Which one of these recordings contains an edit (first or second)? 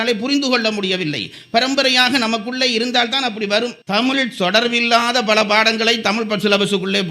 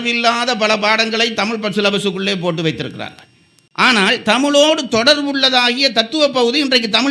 first